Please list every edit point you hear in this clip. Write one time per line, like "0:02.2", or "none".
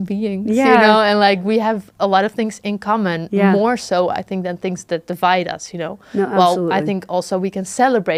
none